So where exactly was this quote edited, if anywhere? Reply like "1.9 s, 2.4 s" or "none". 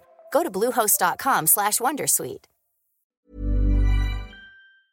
3.1 s

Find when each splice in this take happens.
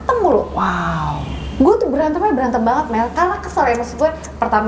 none

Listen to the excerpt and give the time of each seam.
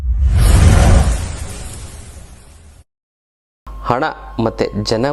3.7 s

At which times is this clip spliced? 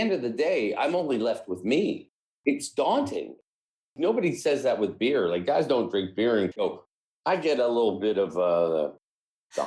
6.5 s

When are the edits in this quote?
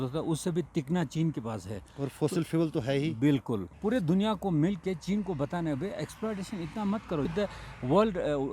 3.7 s

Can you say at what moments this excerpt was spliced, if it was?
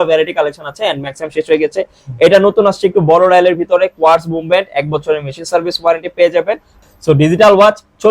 6.9 s

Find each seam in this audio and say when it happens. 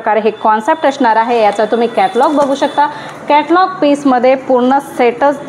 none

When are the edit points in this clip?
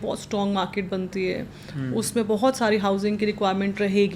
none

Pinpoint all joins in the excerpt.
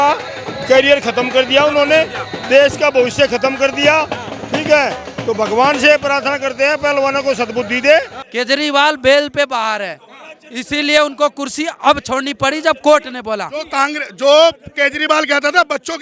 8.2 s

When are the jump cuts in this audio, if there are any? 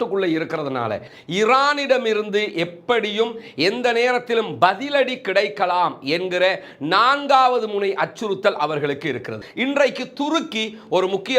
1.1 s, 9.4 s

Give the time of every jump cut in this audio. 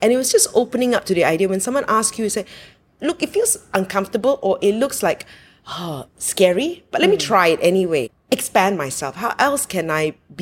8.1 s

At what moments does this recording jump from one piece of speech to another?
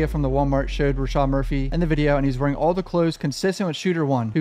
1.7 s

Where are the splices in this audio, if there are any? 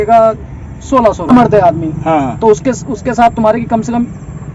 1.3 s

